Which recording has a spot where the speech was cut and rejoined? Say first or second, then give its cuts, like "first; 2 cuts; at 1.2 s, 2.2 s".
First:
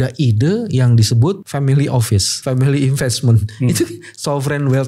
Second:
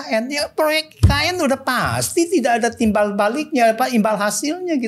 first; 2 cuts; at 1.4 s, 2.3 s